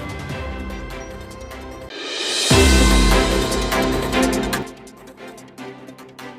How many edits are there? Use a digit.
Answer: 2